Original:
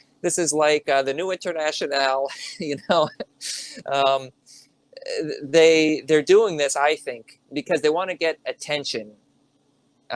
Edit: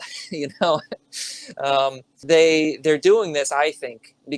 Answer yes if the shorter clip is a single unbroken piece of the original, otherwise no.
no